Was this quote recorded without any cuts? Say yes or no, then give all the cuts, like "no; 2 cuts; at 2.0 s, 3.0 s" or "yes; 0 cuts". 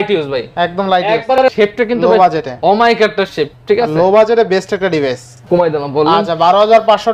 no; 2 cuts; at 1.5 s, 5.4 s